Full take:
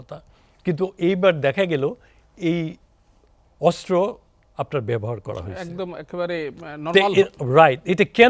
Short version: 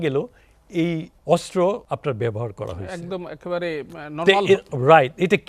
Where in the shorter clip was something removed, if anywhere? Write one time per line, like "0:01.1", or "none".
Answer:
0:01.1
0:01.8